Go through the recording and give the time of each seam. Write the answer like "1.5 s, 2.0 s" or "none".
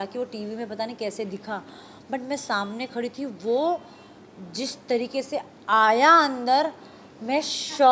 none